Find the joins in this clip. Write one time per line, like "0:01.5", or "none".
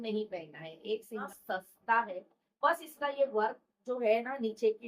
0:01.2

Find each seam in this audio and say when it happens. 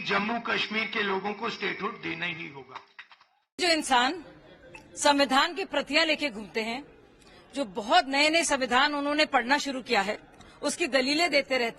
none

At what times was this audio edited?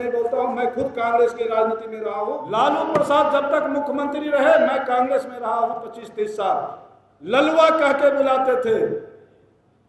0:02.4

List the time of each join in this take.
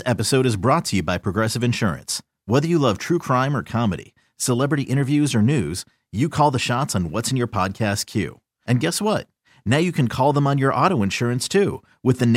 none

